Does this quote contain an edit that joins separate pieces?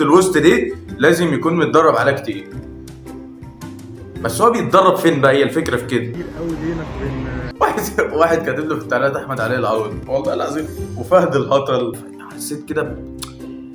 yes; 4 cuts; at 6.1 s, 7.5 s, 10.0 s, 12.0 s

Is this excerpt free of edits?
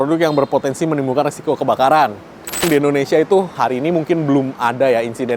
no; 2 cuts; at 2.6 s, 3.5 s

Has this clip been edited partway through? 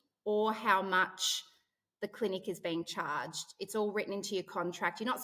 no; 0 cuts

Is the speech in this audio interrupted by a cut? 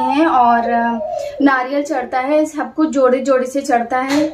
no; 0 cuts

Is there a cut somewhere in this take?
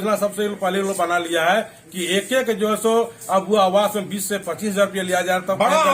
no; 0 cuts

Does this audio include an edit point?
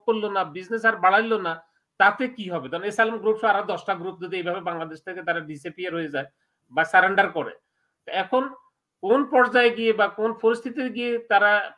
no; 0 cuts

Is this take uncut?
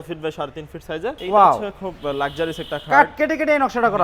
no; 1 cut; at 1.2 s

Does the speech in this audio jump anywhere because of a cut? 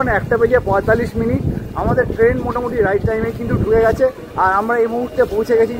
no; 0 cuts

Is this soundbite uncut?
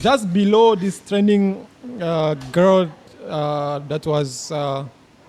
yes; 0 cuts

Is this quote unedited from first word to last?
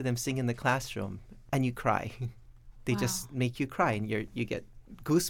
yes; 0 cuts

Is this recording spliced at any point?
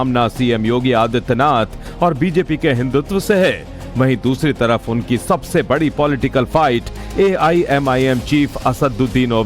no; 0 cuts

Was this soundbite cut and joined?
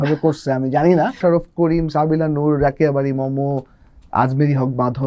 yes; 1 cut; at 1.2 s

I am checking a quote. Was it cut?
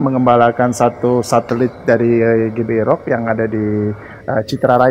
no; 0 cuts

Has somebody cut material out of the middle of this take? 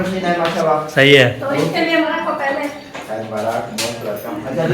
yes; 1 cut; at 2.1 s

